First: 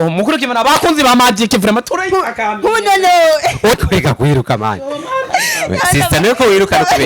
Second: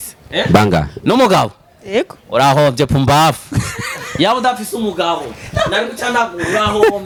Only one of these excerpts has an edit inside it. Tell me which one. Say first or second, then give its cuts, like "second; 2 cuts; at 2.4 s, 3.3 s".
first; 1 cut; at 3.8 s